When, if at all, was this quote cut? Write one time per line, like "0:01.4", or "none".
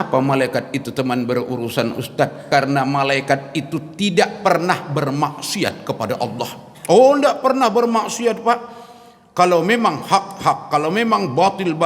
0:02.4